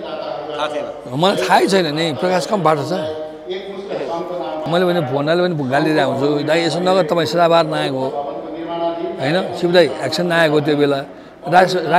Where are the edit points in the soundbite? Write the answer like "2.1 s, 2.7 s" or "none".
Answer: 4.6 s